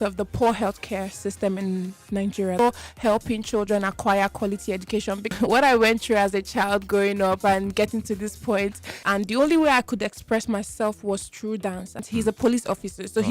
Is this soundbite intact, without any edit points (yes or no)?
no